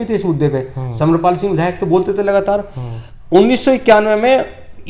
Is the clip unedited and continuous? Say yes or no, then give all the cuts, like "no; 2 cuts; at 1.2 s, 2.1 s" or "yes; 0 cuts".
yes; 0 cuts